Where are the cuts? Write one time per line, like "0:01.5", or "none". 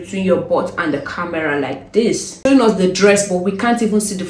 0:02.5